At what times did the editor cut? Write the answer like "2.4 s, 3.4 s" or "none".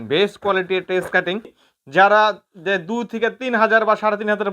1.6 s